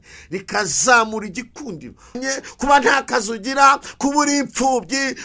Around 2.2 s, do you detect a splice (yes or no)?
yes